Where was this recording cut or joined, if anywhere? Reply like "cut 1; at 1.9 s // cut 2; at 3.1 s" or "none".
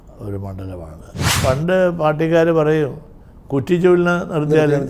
cut 1; at 1.4 s